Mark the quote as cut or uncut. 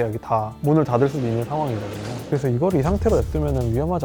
uncut